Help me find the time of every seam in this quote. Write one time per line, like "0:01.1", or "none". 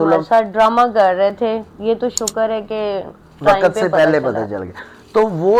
none